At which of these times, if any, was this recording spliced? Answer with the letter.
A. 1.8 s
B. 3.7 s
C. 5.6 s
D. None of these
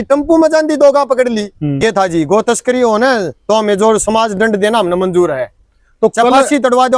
A